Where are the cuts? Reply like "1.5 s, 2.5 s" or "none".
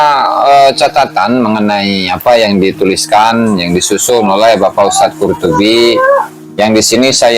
6.4 s